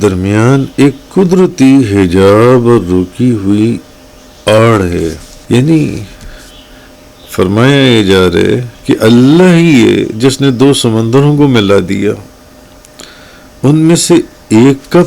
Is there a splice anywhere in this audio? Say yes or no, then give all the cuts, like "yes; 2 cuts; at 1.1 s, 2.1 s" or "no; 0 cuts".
yes; 2 cuts; at 5.3 s, 8.7 s